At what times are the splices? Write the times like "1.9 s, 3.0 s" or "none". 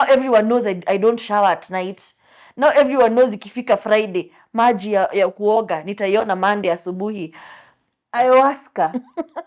8.1 s